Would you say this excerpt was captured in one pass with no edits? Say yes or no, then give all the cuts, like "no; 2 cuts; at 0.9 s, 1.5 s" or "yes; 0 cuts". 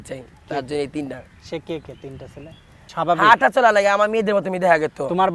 no; 1 cut; at 2.9 s